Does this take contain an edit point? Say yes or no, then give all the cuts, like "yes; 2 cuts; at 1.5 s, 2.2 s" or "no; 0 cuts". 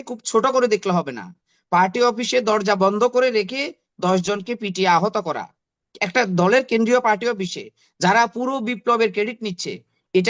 no; 0 cuts